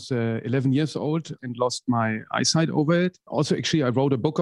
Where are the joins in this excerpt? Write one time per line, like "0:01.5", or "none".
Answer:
0:01.4
0:03.2